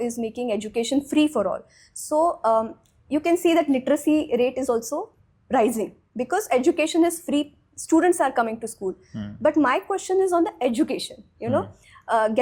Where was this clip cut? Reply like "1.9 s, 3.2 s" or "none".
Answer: none